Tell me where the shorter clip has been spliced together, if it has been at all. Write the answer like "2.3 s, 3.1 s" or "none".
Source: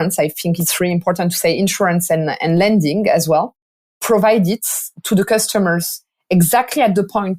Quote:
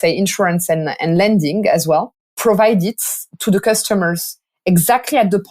2.2 s